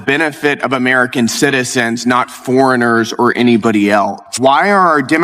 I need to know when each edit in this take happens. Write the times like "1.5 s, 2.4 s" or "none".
4.2 s

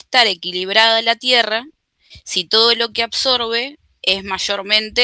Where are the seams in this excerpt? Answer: none

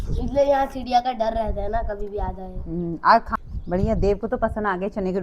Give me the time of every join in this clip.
3.3 s

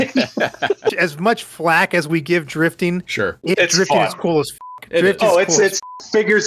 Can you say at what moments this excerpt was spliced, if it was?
1.0 s

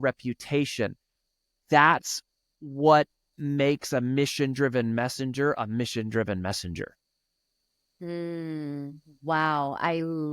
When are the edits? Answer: 8.2 s

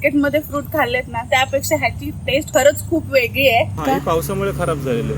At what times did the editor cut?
3.8 s

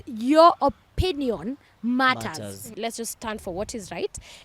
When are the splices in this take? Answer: 2.6 s

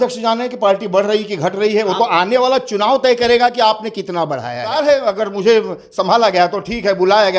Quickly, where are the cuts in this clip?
4.7 s

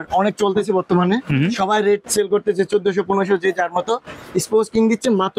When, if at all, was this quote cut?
none

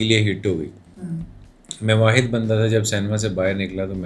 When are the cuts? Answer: none

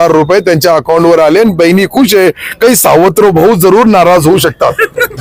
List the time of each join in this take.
none

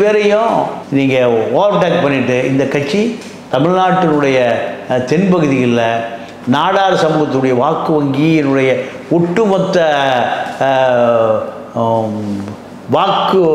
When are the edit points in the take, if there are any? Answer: none

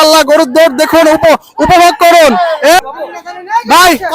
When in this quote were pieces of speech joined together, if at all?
2.8 s

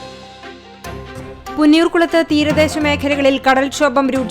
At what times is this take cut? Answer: 1.2 s

